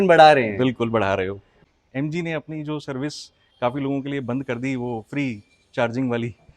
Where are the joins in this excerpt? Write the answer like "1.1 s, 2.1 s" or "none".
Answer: 1.6 s